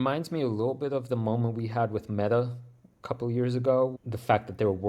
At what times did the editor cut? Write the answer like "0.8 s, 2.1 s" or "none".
4.0 s